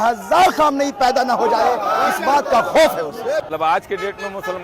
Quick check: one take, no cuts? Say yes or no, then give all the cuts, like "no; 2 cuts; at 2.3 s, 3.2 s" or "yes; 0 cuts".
no; 1 cut; at 3.5 s